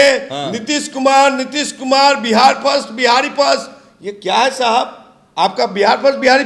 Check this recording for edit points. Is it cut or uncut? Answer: uncut